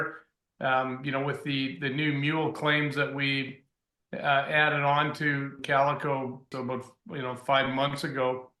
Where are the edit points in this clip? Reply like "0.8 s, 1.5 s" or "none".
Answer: 6.5 s